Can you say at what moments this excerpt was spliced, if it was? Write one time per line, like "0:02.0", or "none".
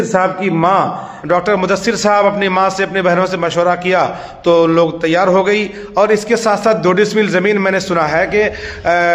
0:01.1